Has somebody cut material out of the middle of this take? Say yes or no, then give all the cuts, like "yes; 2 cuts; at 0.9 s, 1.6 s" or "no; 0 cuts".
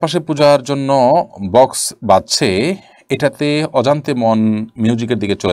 no; 0 cuts